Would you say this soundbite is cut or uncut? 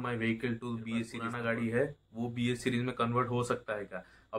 cut